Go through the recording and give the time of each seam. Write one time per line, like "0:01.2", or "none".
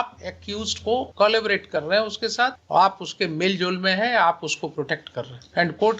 0:01.1
0:02.6